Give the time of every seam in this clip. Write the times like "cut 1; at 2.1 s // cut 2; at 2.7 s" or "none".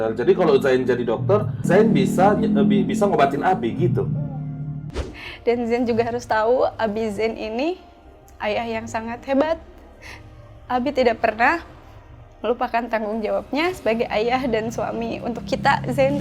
cut 1; at 5.1 s